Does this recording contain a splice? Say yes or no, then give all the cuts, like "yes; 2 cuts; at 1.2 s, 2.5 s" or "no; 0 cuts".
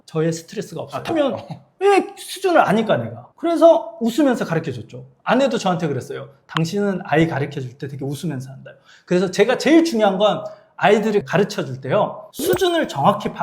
no; 0 cuts